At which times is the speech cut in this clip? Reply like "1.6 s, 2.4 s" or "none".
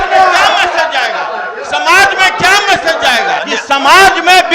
3.4 s